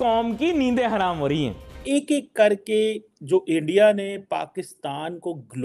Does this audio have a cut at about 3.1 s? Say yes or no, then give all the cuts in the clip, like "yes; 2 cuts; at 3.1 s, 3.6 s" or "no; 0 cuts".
no; 1 cut; at 1.7 s